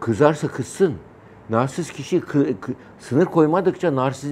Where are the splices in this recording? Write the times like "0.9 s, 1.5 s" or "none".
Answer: none